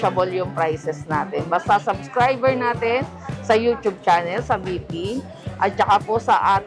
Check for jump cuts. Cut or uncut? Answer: uncut